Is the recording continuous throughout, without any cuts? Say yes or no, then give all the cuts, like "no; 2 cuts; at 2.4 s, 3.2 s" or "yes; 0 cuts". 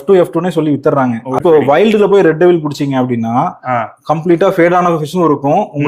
no; 1 cut; at 1.4 s